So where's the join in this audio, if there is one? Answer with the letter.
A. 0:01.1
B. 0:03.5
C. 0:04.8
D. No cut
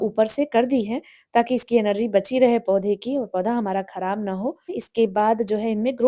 C